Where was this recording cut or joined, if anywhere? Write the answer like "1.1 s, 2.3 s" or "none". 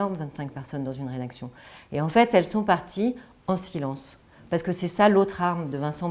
none